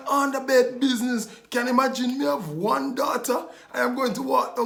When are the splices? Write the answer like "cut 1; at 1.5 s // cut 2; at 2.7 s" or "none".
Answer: none